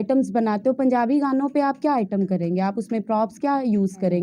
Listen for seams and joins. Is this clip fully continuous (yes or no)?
yes